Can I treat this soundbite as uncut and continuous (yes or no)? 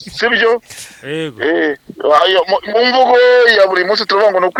yes